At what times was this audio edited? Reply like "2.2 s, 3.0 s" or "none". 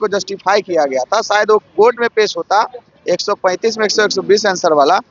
none